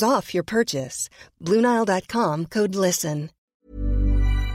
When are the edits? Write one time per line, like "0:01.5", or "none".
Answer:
0:03.4

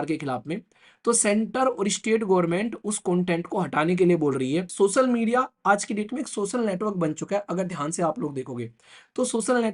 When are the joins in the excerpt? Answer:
0:04.7

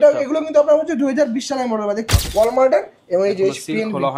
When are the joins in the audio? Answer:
0:02.1

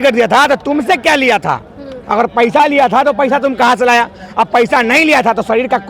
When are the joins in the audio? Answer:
none

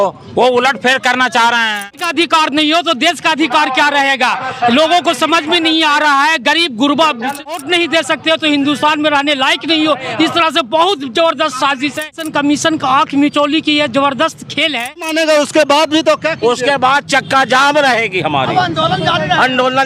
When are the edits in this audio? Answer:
0:02.0
0:07.6
0:12.2
0:15.1

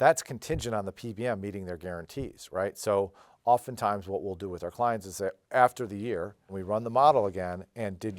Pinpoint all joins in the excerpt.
0:06.5

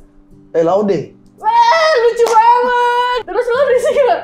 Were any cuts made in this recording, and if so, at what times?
0:03.2

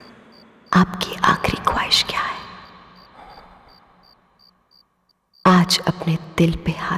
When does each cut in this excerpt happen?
none

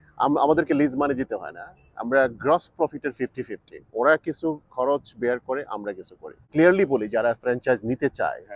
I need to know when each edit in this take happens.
0:06.5

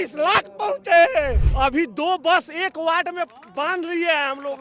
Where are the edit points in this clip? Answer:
0:01.4

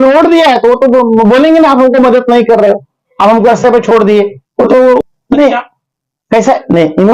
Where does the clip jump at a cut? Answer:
0:05.0

